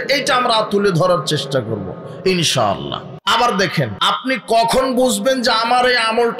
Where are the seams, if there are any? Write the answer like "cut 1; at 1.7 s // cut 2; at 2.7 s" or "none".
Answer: cut 1; at 3.1 s // cut 2; at 4.0 s